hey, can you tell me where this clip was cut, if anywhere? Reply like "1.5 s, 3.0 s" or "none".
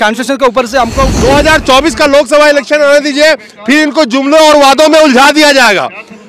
1.1 s

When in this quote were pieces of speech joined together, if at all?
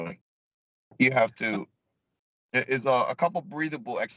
none

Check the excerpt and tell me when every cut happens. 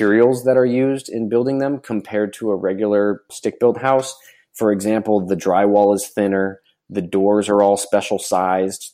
none

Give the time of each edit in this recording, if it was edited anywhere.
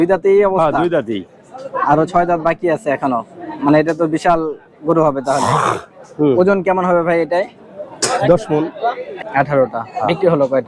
9.1 s

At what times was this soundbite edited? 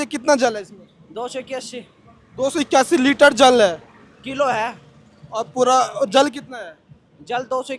none

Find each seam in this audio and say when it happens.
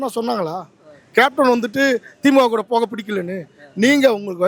none

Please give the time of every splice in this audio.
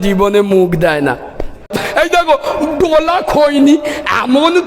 1.8 s

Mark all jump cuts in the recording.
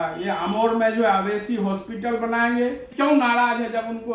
2.9 s

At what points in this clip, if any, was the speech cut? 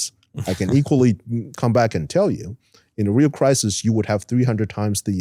none

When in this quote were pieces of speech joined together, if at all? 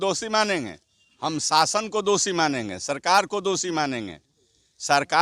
none

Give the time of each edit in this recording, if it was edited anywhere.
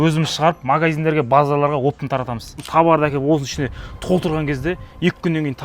2.7 s

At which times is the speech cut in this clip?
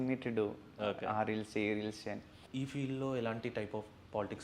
2.3 s

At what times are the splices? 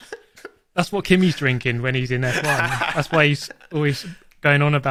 none

